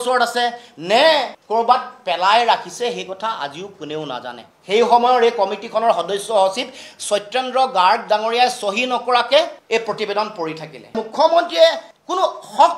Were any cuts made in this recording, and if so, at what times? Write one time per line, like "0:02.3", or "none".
0:04.5
0:11.0